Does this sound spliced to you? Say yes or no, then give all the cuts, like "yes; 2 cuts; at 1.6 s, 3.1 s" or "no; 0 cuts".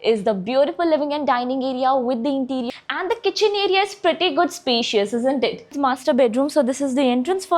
yes; 2 cuts; at 2.7 s, 5.8 s